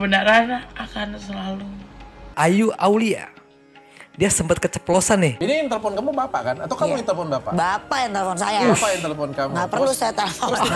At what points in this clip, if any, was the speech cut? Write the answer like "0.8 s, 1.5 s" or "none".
2.3 s, 5.4 s